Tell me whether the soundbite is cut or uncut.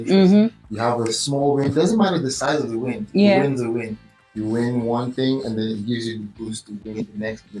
uncut